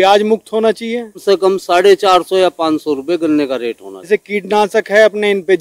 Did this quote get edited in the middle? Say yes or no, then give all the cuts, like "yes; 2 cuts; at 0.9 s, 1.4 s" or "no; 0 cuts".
yes; 2 cuts; at 1.2 s, 4.1 s